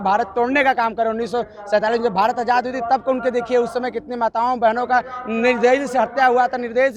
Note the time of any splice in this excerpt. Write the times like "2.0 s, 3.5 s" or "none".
none